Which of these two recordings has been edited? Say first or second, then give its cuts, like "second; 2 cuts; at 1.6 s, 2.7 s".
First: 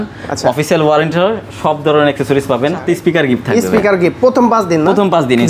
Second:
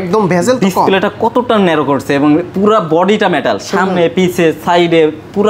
first; 1 cut; at 2.8 s